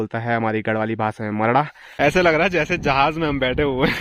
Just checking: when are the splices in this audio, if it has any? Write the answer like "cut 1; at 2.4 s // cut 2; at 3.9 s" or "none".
cut 1; at 2.0 s